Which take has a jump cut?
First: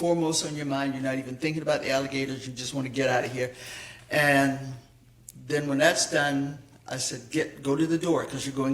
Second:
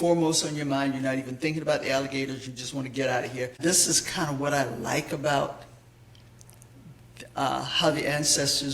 second; 1 cut; at 3.6 s

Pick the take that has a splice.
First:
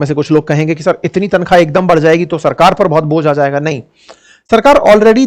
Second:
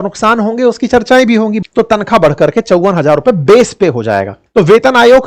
second; 2 cuts; at 1.6 s, 4.3 s

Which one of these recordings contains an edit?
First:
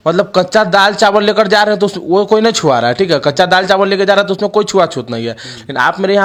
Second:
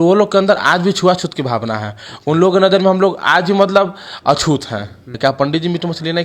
second; 1 cut; at 5.1 s

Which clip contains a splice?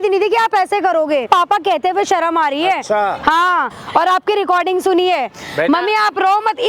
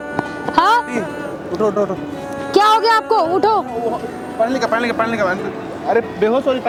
first; 2 cuts; at 1.3 s, 3.8 s

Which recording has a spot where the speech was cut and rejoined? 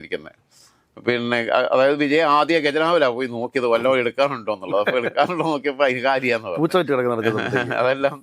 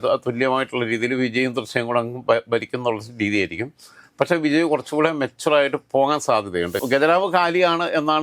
second; 1 cut; at 6.8 s

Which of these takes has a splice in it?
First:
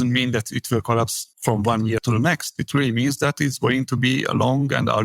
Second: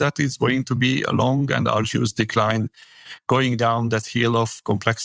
first; 1 cut; at 1.3 s

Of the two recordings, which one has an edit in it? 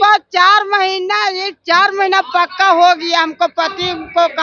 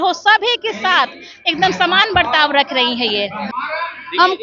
second; 1 cut; at 3.4 s

